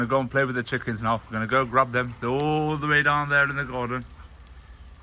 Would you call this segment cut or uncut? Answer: uncut